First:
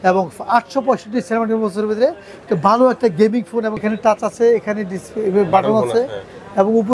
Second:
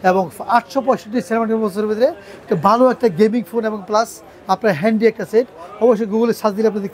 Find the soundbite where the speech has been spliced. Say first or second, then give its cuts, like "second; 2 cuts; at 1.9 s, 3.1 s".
first; 1 cut; at 3.8 s